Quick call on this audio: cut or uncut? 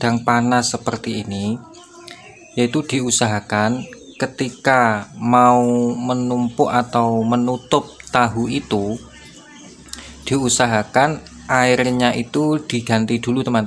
uncut